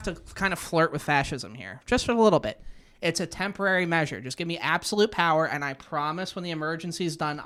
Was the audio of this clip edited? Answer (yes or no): no